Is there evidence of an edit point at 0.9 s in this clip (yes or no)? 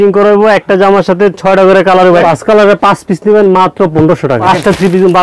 no